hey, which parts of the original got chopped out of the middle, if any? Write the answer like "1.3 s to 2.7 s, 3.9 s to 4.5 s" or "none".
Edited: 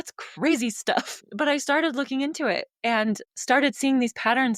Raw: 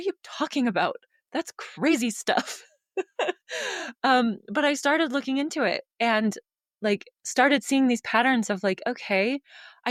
2.7 s to 4.4 s, 6.5 s to 7.2 s

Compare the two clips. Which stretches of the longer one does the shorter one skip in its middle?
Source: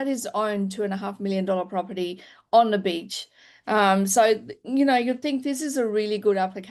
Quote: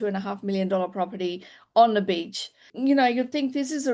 3.4 s to 4.6 s

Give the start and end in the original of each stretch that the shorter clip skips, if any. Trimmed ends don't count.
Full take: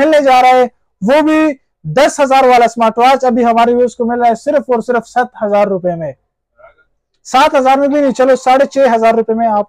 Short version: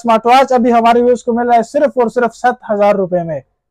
none

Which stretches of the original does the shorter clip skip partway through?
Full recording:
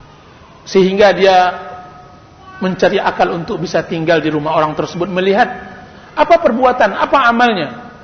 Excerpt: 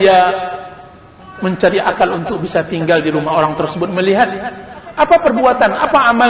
none

